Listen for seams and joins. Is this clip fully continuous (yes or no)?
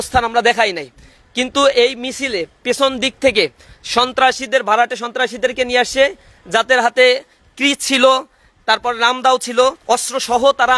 no